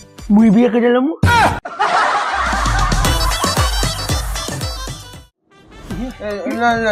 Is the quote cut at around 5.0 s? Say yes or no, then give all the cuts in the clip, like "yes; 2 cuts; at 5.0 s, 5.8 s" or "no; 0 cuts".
no; 0 cuts